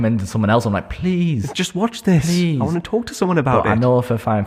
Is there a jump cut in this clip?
no; 0 cuts

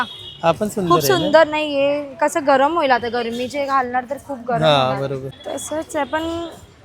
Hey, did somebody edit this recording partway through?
yes; 1 cut; at 5.3 s

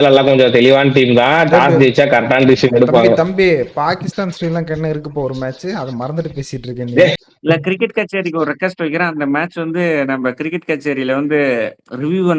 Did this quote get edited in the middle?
yes; 1 cut; at 7.3 s

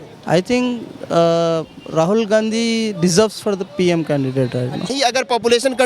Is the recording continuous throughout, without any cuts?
no; 1 cut; at 4.9 s

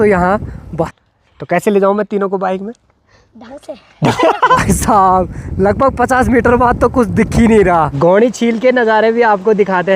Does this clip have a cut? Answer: yes; 3 cuts; at 0.9 s, 4.6 s, 7.9 s

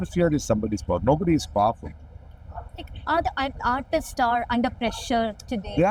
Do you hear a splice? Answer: no; 0 cuts

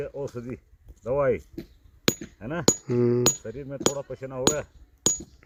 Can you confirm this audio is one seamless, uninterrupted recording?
yes; 0 cuts

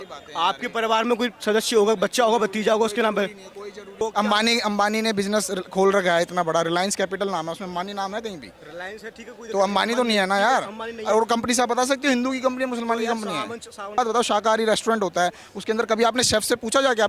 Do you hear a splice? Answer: yes; 2 cuts; at 4.0 s, 14.0 s

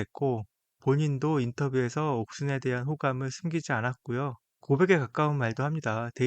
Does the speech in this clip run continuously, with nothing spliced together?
no; 1 cut; at 4.5 s

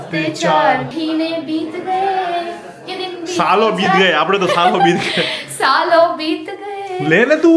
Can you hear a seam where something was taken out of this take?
yes; 1 cut; at 0.9 s

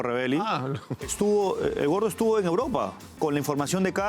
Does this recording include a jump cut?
yes; 1 cut; at 3.1 s

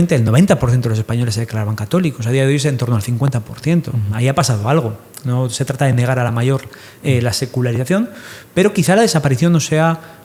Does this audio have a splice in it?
no; 0 cuts

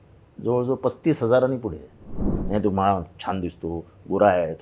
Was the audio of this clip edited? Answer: yes; 1 cut; at 2.3 s

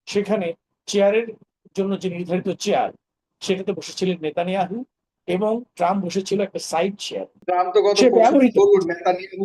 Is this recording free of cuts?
no; 1 cut; at 7.4 s

